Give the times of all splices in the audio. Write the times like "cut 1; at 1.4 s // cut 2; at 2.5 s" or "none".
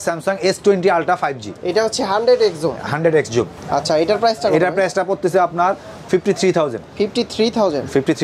none